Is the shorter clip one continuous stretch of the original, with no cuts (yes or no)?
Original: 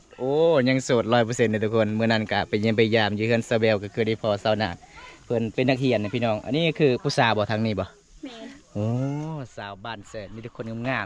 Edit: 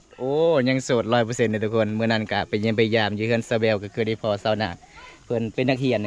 yes